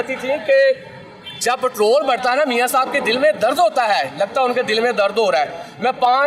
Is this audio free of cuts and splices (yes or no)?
yes